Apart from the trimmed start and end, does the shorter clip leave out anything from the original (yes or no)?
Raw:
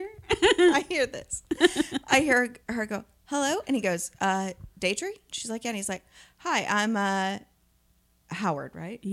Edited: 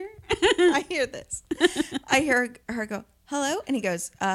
no